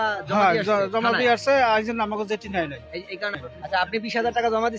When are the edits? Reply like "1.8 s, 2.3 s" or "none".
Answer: 3.5 s